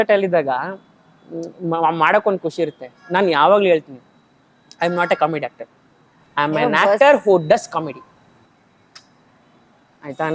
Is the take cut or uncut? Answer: uncut